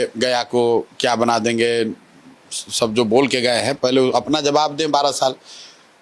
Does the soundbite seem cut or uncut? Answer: uncut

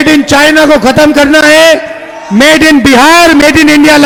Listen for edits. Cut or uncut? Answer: uncut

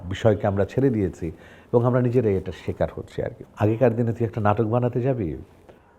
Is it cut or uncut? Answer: cut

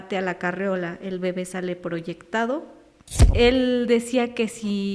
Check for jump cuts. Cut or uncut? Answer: cut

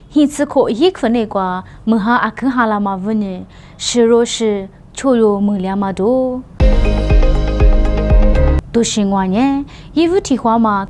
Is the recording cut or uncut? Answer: cut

